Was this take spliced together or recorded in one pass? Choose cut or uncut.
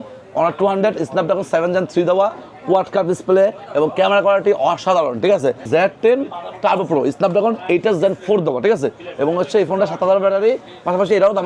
cut